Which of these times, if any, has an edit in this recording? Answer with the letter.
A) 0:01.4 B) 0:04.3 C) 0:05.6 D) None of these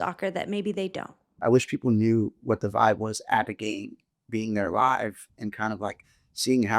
A